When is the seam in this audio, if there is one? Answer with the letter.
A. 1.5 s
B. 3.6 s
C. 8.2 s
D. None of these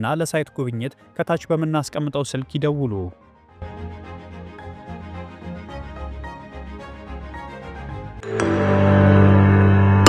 C